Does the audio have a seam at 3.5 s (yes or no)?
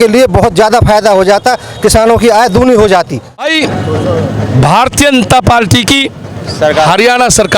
yes